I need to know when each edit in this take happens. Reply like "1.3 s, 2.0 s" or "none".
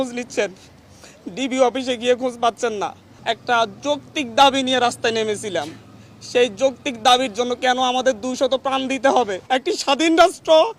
3.1 s, 9.4 s